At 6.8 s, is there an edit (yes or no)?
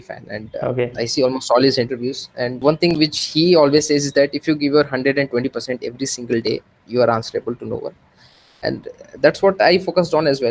no